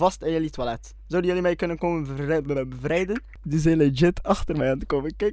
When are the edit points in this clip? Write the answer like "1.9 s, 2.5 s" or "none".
3.4 s